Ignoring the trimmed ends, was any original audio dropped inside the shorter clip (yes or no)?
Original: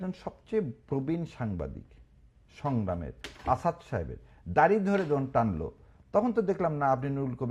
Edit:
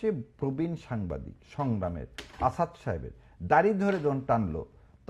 yes